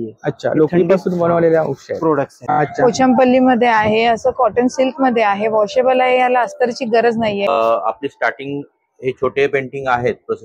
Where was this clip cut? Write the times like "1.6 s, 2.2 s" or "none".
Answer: 2.6 s, 7.5 s